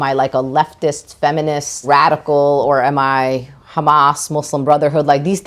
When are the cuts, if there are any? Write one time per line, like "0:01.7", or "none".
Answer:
0:01.8